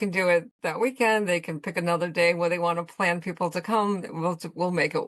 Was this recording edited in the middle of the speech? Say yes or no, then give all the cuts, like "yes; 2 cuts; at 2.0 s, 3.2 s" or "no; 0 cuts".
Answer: no; 0 cuts